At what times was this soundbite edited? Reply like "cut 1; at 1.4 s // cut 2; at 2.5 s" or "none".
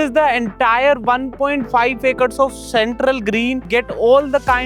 cut 1; at 3.6 s